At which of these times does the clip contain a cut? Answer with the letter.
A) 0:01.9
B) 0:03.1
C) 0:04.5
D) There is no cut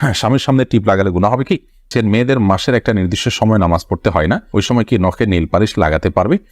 A